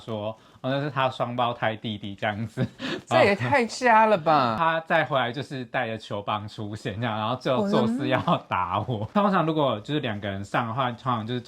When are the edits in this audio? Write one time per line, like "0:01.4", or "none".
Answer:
0:04.6
0:09.1